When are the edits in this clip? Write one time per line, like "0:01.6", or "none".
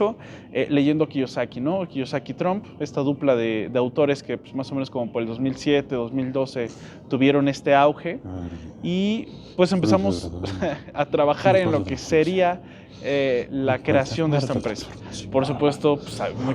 none